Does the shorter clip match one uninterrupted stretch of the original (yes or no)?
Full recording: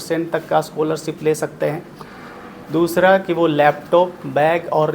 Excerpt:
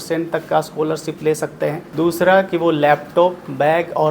no